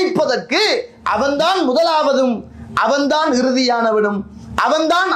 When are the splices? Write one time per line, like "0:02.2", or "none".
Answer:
0:00.9